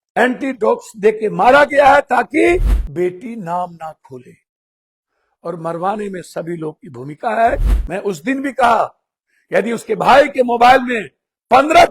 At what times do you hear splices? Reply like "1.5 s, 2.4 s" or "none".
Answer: 2.8 s, 7.8 s